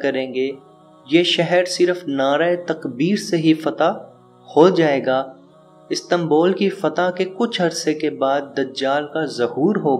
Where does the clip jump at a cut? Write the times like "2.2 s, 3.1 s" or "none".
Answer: none